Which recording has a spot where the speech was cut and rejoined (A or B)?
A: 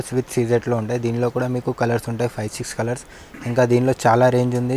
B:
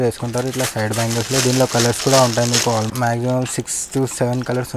B